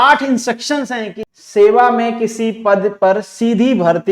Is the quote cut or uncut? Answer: cut